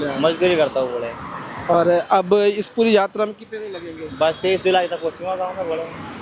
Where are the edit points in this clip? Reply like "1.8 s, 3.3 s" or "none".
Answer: none